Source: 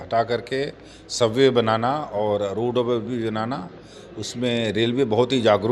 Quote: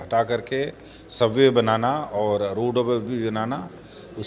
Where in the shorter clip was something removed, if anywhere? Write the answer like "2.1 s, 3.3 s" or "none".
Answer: none